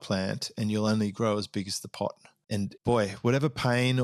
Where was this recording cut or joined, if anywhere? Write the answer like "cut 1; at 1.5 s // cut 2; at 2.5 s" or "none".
cut 1; at 2.3 s